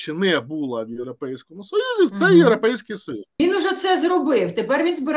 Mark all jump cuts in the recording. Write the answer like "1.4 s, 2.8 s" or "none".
3.4 s